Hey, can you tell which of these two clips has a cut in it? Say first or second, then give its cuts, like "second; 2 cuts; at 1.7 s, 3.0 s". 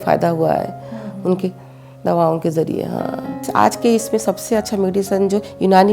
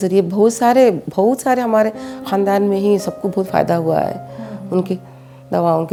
first; 1 cut; at 3.4 s